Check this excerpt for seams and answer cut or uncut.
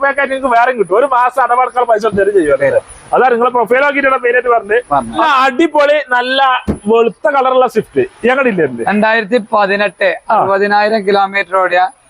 uncut